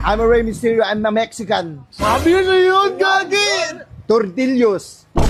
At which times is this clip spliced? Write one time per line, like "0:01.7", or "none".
none